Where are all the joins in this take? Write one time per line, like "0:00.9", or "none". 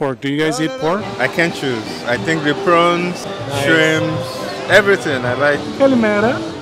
0:01.1
0:05.6

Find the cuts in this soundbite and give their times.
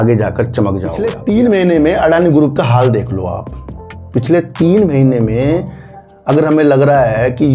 0:01.1

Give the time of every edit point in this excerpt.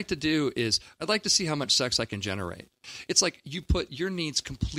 0:02.8

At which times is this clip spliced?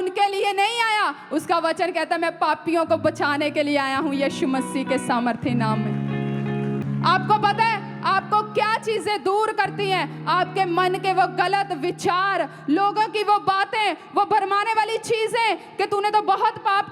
0:06.8

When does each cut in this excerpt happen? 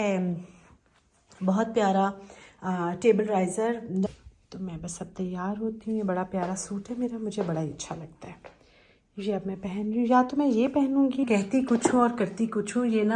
0:04.1
0:11.2

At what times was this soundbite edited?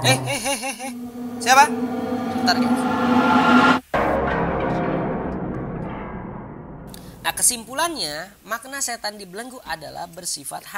0:06.5

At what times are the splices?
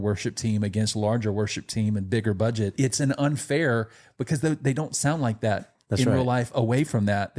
none

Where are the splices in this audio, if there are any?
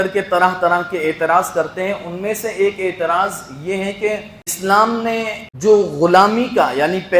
0:04.6
0:05.4

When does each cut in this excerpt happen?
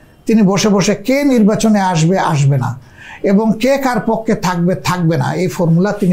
none

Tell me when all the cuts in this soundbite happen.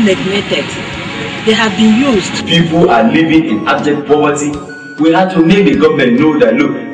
0:02.4

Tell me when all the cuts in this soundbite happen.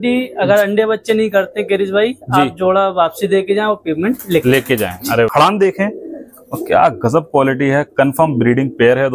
0:05.3

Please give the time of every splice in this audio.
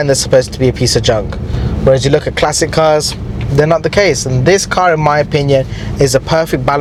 none

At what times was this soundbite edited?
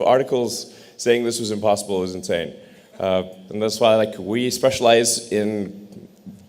0:03.4

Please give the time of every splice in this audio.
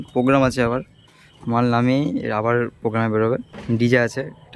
0:03.5

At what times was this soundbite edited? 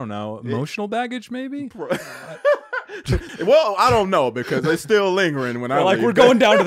0:03.3

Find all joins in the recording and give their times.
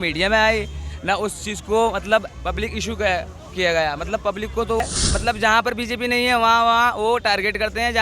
0:04.8

